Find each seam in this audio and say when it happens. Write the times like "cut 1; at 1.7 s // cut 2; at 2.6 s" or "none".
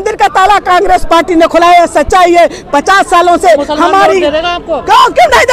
none